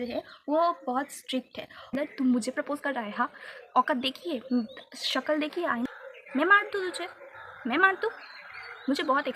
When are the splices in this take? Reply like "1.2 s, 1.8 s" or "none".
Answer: 1.9 s, 5.9 s